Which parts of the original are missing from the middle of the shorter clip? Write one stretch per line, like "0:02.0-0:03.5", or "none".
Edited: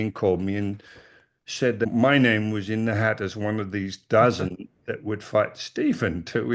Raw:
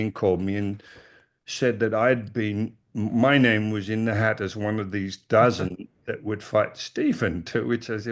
0:01.9-0:03.1